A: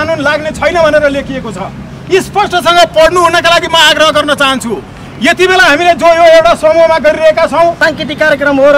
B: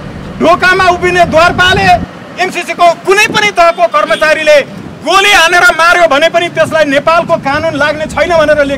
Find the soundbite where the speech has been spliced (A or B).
A